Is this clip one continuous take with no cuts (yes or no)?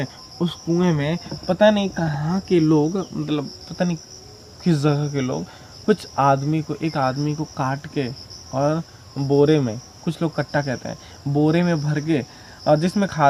yes